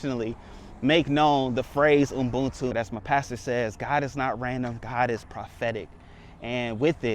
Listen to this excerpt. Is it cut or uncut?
cut